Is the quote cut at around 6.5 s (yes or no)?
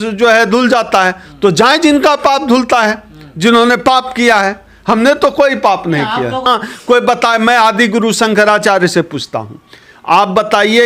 yes